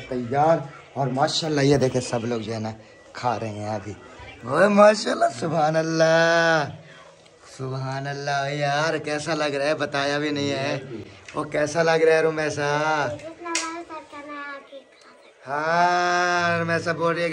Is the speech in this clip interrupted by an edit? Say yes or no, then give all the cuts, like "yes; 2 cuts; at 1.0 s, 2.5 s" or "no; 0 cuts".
no; 0 cuts